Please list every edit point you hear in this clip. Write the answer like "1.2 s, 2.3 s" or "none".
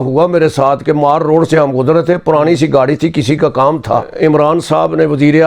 4.1 s